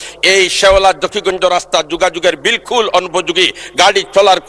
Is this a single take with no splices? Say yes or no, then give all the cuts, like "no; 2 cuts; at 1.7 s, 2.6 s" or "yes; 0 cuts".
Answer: yes; 0 cuts